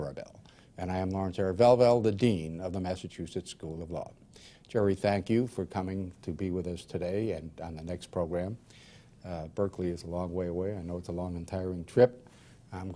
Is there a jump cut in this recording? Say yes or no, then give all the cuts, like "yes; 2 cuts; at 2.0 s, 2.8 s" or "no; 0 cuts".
no; 0 cuts